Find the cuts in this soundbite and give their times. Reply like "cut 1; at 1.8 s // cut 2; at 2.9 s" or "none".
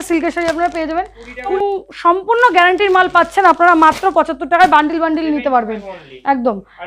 cut 1; at 1.6 s